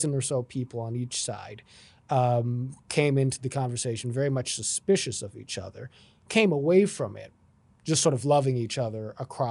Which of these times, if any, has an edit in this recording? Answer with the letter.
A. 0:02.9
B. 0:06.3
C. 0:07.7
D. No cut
D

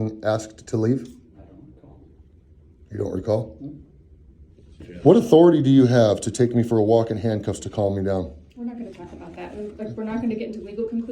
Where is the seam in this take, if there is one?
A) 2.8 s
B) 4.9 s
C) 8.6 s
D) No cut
B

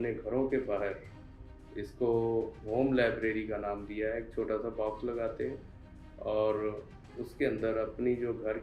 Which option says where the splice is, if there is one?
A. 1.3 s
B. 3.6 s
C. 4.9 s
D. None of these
D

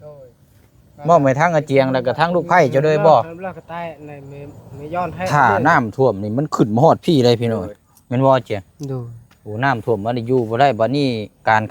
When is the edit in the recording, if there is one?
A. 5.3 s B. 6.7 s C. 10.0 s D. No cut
A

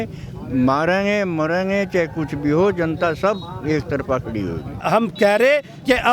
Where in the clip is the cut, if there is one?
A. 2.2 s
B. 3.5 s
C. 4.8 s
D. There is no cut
C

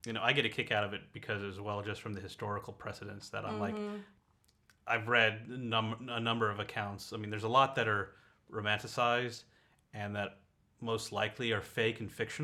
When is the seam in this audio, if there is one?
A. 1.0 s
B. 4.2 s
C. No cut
B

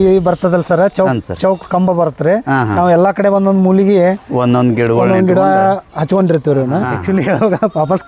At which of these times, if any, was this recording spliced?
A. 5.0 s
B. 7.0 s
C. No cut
B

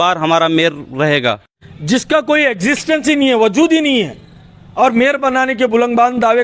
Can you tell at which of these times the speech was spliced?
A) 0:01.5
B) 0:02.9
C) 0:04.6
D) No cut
A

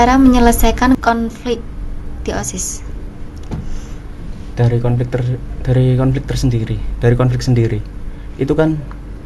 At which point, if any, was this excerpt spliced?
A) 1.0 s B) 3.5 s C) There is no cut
A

